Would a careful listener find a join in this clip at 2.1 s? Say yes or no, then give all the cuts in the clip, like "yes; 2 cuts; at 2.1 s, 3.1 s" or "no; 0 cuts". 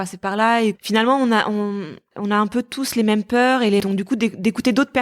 yes; 3 cuts; at 0.8 s, 2.1 s, 3.8 s